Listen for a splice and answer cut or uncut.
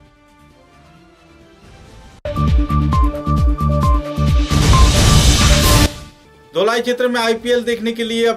cut